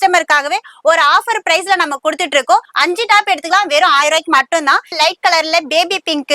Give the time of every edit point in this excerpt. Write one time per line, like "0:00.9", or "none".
0:02.7
0:04.9